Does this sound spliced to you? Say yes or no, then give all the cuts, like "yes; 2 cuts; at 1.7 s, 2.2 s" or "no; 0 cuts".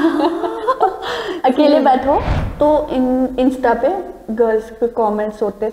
yes; 1 cut; at 2.4 s